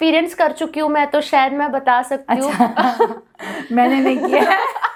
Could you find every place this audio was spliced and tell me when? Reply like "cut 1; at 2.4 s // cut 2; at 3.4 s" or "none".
none